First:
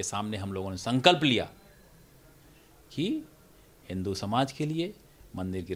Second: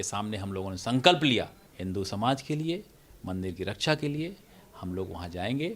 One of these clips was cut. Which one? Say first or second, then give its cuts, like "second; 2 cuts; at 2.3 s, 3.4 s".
second; 1 cut; at 1.6 s